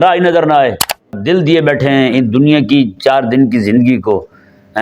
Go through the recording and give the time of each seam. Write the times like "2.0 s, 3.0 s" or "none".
1.2 s